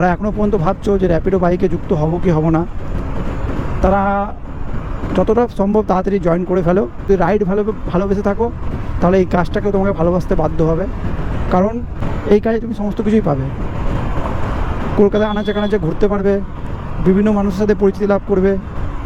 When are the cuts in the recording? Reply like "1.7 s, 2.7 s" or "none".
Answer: none